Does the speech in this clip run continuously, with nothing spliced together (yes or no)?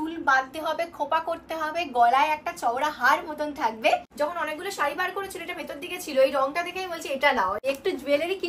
no